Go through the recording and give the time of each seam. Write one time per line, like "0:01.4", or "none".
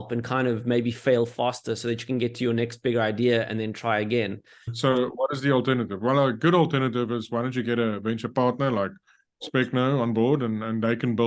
0:04.7